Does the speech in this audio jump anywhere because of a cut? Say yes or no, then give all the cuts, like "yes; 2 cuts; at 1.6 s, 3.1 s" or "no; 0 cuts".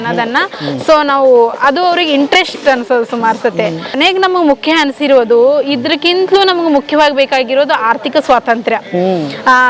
yes; 1 cut; at 4.0 s